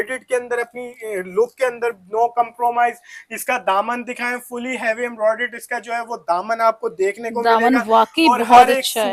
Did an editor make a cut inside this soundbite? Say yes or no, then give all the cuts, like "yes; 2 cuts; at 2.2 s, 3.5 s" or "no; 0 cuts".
no; 0 cuts